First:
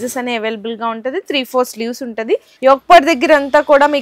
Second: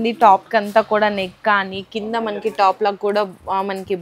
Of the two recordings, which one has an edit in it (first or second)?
first